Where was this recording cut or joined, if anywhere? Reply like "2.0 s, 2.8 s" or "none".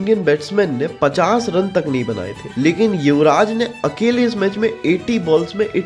none